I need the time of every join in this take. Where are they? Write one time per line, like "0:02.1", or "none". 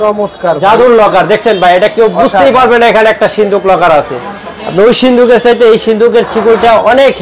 none